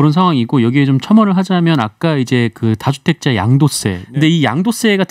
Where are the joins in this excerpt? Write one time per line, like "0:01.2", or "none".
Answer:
0:04.0